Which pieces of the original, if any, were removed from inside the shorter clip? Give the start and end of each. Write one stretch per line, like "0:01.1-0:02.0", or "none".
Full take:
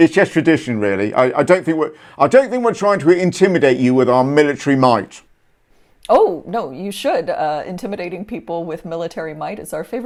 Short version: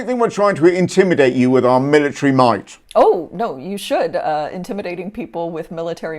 0:05.2-0:05.9